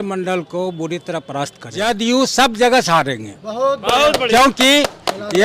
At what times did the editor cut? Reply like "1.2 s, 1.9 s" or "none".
1.6 s